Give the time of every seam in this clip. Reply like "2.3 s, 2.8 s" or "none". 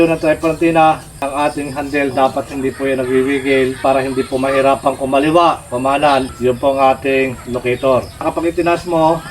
1.3 s, 3.8 s, 6.3 s, 8.3 s